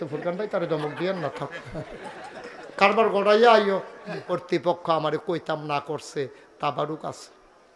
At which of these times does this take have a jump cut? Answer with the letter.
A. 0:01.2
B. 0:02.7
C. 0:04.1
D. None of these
C